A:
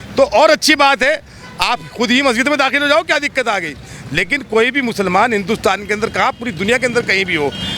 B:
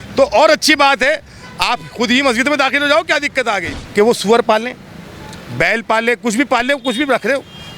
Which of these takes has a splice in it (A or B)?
B